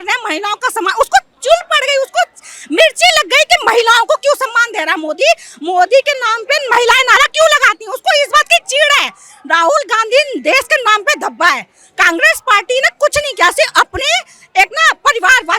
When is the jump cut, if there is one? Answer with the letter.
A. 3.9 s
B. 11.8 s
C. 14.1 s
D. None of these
D